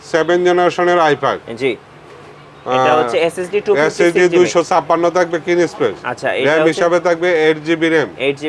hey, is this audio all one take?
yes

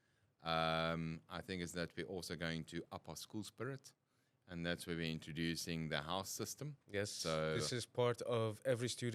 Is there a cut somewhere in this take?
no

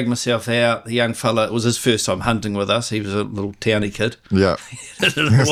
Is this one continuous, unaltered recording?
yes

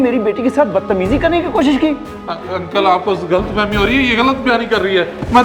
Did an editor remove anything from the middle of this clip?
no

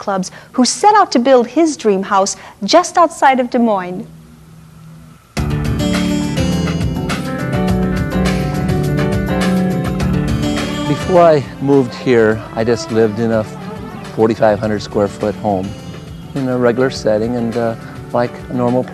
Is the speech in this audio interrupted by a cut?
yes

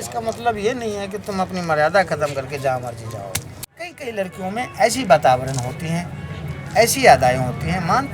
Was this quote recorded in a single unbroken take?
no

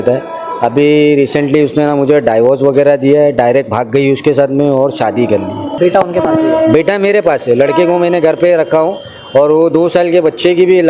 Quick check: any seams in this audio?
yes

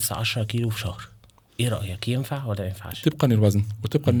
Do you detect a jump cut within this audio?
no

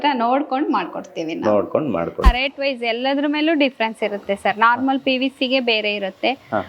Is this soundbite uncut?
no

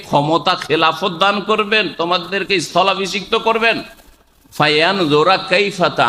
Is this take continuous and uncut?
yes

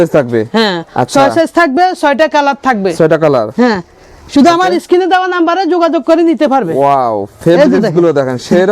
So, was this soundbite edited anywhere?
no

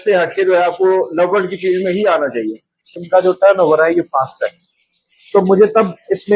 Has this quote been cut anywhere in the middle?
yes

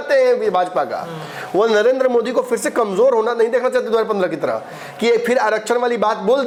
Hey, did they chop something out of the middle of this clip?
no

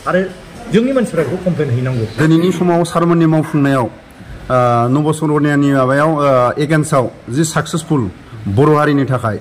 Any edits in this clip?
yes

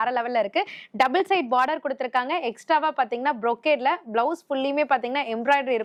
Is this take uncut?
yes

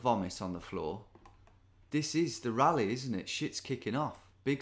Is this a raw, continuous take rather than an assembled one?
no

